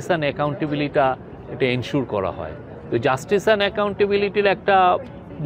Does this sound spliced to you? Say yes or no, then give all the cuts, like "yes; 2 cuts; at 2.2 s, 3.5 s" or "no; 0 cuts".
no; 0 cuts